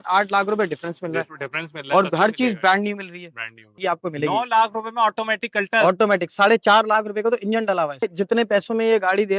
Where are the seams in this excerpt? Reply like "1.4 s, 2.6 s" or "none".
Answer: 3.7 s, 8.1 s